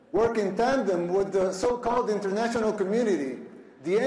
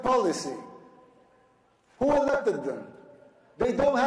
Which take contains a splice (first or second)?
first